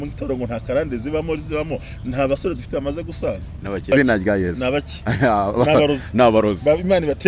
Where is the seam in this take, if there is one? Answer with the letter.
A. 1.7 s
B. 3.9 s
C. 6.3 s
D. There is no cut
B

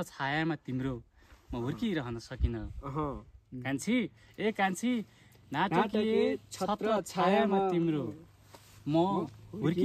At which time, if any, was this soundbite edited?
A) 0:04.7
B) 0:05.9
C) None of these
C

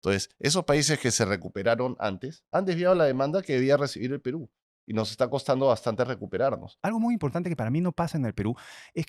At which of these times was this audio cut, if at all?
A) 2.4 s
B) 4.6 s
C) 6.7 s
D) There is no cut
C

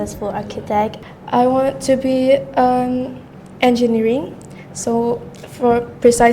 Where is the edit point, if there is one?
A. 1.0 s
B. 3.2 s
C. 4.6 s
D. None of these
A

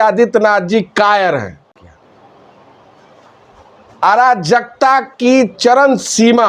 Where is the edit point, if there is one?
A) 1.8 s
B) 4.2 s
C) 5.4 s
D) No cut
A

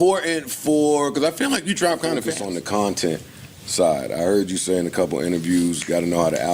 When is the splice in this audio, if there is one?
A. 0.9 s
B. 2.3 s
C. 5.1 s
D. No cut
B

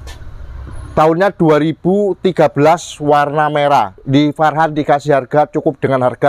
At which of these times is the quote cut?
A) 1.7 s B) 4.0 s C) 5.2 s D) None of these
B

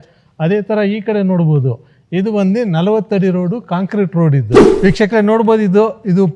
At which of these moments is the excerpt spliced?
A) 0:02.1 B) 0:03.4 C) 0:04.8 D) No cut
C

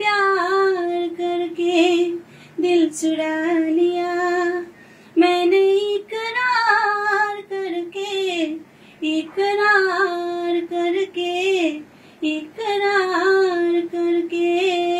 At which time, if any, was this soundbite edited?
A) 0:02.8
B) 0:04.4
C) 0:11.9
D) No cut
D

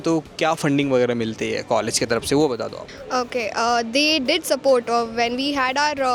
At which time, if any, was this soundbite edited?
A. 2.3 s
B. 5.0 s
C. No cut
C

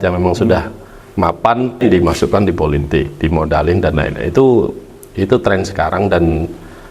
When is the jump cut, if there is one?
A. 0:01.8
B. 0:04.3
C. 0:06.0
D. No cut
A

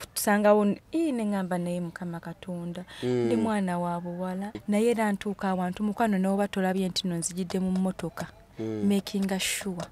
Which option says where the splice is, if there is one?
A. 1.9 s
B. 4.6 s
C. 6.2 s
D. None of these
B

